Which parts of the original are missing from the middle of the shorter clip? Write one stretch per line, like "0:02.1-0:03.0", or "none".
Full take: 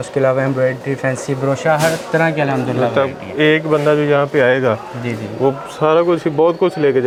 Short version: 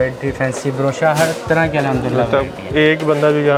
none